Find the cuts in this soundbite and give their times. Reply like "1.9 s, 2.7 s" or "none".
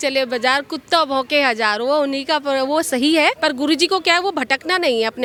none